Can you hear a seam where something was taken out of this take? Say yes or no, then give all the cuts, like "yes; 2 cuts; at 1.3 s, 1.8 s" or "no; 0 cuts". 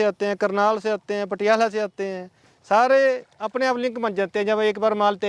no; 0 cuts